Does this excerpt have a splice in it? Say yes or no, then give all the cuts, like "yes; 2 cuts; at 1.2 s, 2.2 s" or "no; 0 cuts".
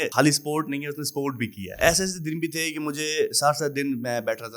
yes; 1 cut; at 1.6 s